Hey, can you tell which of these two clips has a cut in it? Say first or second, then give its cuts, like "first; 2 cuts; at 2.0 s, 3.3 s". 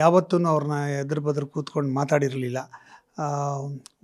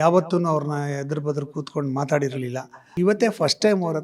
second; 1 cut; at 2.9 s